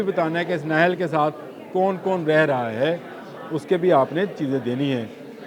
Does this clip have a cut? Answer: no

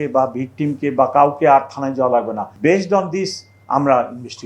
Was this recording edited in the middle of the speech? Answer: yes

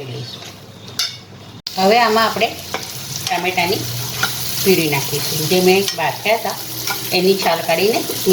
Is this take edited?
yes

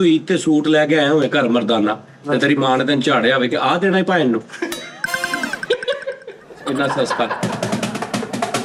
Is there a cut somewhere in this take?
no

